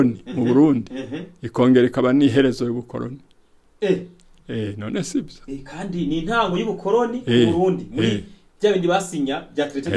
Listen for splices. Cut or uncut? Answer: uncut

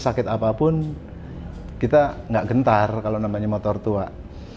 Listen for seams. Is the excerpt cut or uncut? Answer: uncut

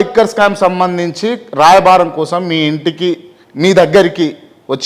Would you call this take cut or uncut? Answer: uncut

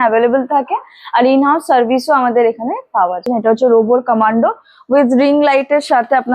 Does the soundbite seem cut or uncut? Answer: cut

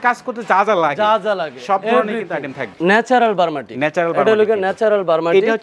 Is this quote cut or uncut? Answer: cut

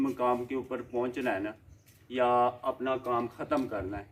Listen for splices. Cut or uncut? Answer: uncut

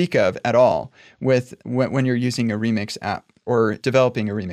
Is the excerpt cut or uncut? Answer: uncut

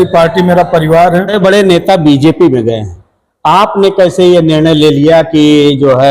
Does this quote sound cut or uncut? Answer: cut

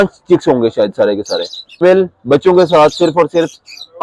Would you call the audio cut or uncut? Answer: cut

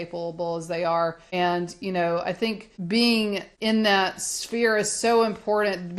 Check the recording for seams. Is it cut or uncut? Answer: cut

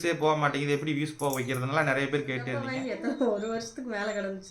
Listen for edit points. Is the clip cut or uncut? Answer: cut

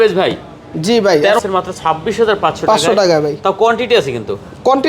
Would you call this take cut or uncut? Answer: cut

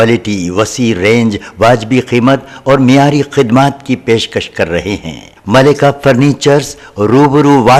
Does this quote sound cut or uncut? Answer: uncut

